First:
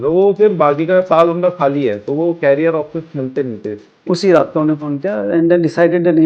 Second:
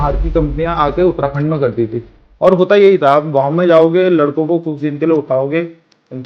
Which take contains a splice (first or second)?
first